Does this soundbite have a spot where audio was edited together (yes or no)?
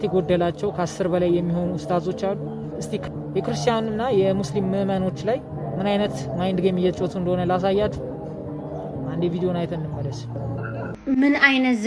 yes